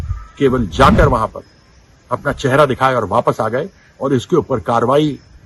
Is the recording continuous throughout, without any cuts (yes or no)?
yes